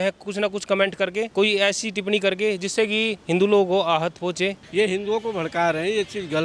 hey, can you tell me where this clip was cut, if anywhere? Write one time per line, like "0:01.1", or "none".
0:01.3
0:03.2
0:04.6